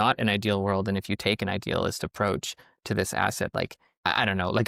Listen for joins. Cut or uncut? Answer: uncut